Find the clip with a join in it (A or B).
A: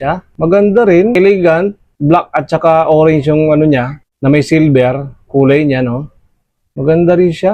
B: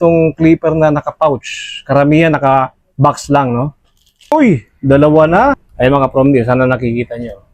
B